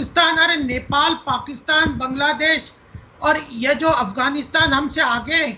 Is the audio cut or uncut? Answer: uncut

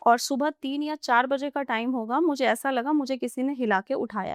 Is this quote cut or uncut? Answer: uncut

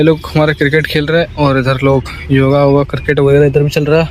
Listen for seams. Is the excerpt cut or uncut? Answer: uncut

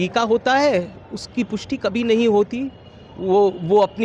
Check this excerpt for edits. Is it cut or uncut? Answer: uncut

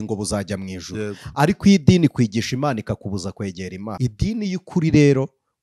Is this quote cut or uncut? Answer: cut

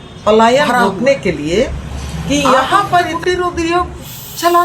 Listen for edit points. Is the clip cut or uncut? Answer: cut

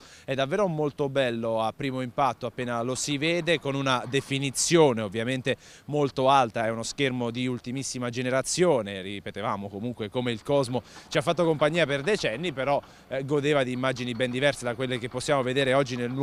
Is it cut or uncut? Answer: uncut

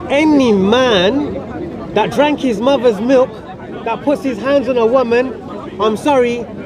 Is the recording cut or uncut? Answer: uncut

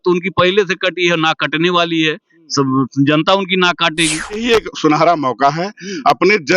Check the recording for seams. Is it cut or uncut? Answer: cut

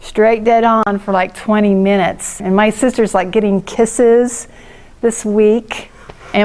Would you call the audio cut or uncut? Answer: uncut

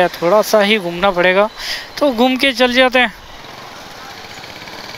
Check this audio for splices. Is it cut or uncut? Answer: uncut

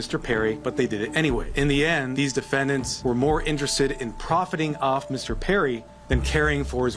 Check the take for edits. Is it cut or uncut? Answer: uncut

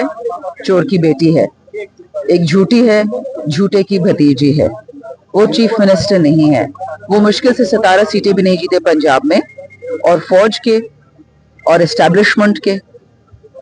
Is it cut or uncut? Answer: uncut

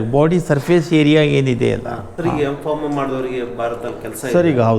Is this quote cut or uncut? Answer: cut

